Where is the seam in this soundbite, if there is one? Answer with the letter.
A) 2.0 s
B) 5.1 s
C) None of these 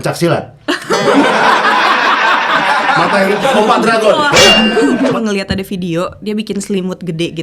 B